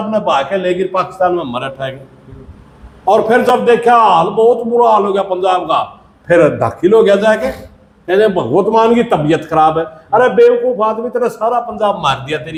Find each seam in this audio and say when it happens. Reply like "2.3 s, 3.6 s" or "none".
none